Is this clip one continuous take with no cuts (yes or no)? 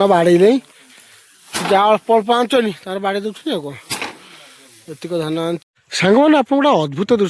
no